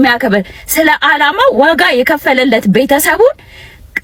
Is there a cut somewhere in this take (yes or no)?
no